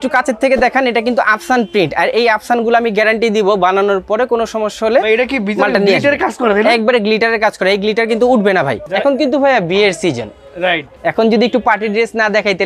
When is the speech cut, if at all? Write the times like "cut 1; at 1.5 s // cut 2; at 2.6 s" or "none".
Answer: cut 1; at 8.8 s // cut 2; at 10.9 s